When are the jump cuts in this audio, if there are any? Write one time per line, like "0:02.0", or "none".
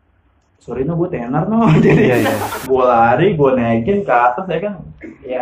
0:02.4